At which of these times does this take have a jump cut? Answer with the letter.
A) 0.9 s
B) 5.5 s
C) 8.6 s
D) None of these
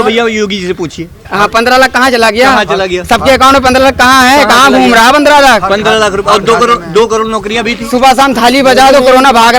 D